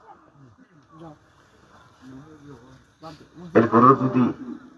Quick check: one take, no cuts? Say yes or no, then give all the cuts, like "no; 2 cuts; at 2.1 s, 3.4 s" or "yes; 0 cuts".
yes; 0 cuts